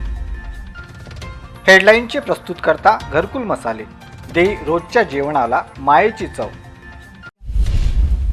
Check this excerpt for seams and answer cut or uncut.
cut